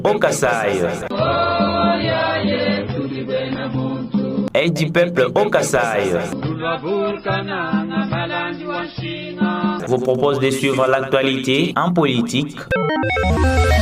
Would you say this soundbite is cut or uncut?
uncut